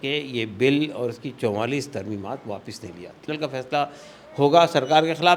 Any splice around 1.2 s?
no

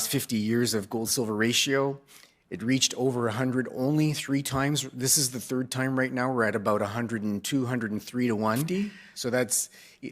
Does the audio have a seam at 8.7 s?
yes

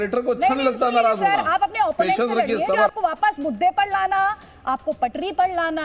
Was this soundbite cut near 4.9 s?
no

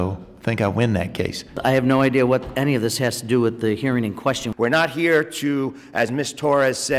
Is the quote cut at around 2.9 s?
no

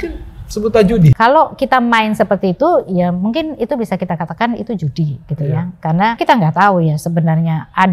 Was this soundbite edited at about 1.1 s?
yes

